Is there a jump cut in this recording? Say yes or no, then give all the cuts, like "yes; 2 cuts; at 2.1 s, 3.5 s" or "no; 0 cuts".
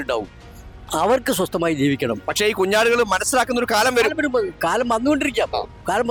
no; 0 cuts